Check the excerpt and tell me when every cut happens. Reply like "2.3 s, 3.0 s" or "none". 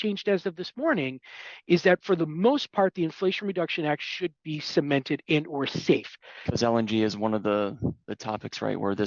6.4 s